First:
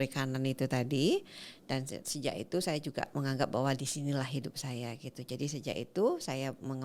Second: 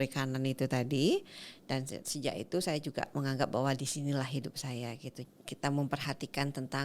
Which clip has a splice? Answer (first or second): second